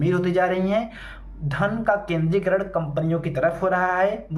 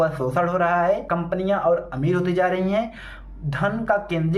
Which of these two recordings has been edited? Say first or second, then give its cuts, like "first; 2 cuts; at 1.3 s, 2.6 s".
second; 1 cut; at 1.0 s